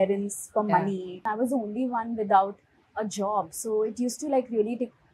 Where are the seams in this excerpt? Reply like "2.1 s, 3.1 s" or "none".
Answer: 1.2 s